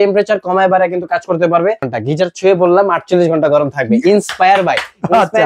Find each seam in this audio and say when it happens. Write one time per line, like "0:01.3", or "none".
0:01.9